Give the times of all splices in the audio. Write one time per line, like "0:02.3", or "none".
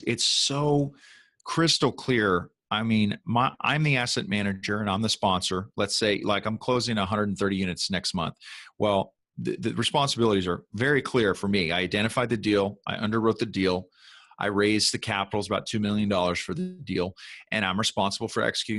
0:09.2